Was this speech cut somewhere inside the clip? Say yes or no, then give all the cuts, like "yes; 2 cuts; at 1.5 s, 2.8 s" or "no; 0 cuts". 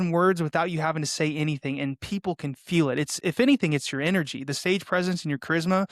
no; 0 cuts